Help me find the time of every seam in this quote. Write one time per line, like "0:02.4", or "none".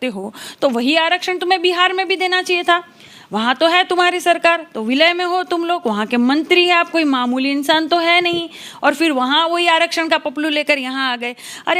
none

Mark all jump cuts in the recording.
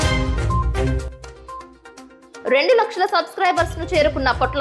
0:01.6

